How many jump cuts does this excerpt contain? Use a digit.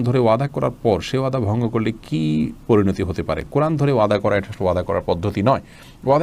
0